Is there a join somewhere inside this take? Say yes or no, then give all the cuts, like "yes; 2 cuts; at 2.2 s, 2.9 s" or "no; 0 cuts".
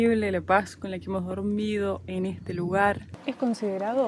yes; 1 cut; at 3.1 s